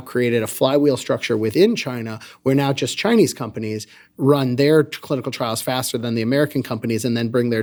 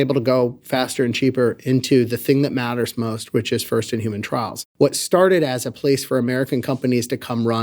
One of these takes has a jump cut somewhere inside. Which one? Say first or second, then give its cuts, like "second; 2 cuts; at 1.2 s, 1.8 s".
second; 1 cut; at 4.6 s